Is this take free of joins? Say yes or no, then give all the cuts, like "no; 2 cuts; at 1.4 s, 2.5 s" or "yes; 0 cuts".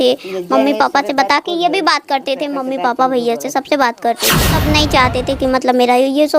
no; 1 cut; at 4.6 s